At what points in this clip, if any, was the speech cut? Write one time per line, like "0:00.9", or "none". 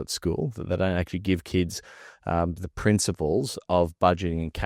none